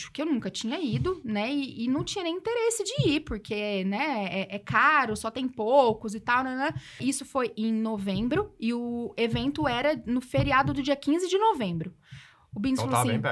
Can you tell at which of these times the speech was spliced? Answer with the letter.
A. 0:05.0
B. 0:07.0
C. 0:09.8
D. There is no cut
B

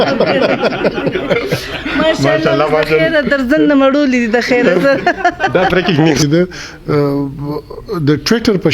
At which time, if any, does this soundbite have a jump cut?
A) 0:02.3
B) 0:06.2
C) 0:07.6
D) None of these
B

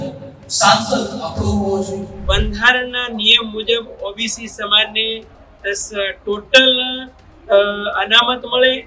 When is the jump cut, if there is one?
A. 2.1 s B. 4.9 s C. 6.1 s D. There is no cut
A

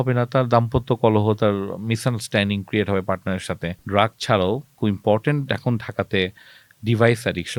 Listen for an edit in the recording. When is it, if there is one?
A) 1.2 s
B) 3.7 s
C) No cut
B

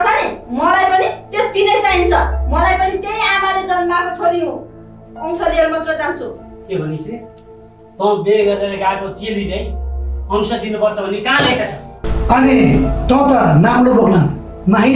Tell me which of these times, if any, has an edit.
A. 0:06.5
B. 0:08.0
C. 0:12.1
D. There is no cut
C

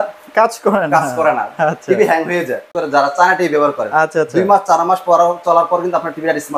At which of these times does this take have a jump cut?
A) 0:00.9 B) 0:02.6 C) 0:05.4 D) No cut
B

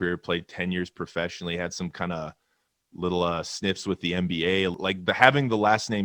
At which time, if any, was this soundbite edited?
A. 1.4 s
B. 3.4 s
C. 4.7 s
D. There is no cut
C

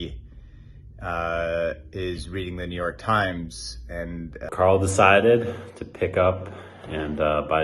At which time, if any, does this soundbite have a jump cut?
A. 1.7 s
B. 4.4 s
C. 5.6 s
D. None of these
B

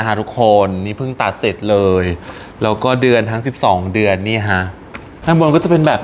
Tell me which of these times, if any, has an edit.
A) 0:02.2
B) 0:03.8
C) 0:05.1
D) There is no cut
C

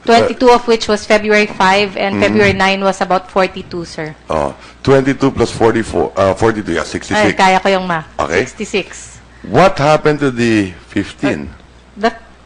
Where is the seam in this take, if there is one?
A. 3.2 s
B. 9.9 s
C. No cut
B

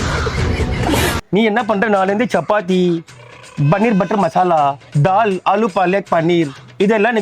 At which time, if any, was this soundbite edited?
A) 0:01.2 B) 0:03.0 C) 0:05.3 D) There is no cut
A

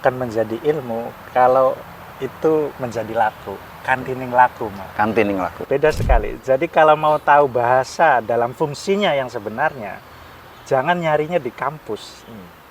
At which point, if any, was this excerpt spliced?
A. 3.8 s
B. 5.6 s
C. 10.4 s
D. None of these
B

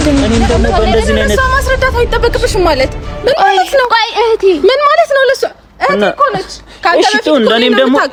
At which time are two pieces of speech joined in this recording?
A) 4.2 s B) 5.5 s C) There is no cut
C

